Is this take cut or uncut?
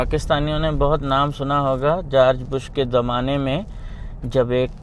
uncut